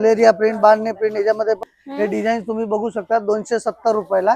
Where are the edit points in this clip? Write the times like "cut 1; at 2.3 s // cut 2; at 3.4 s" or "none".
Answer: cut 1; at 1.7 s